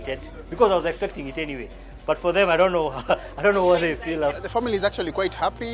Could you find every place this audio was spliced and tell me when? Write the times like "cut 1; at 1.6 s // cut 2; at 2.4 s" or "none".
cut 1; at 4.4 s